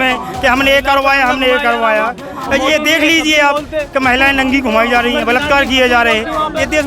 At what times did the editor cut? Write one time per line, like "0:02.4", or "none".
none